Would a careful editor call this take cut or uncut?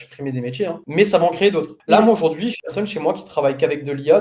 uncut